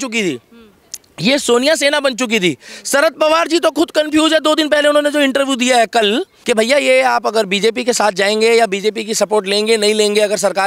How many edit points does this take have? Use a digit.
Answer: 1